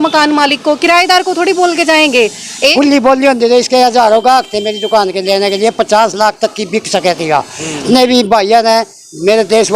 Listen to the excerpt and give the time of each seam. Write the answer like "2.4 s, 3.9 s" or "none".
2.7 s, 7.8 s